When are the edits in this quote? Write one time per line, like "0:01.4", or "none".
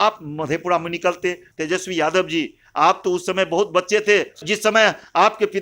0:01.5
0:04.4